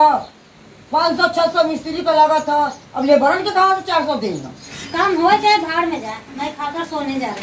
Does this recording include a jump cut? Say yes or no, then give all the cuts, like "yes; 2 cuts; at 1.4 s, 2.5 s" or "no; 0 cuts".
yes; 1 cut; at 4.8 s